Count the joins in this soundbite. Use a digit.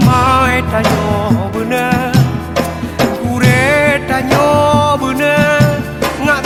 0